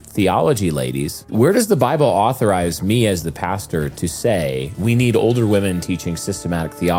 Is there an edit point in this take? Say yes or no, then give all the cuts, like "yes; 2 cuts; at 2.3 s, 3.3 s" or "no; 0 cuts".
no; 0 cuts